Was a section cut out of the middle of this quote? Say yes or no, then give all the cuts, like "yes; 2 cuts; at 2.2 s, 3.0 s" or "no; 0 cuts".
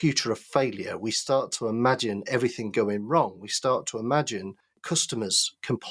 yes; 1 cut; at 4.9 s